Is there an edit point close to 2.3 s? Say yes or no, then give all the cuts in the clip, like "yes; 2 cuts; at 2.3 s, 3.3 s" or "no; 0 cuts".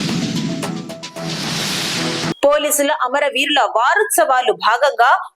no; 0 cuts